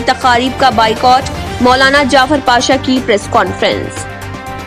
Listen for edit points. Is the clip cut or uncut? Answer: uncut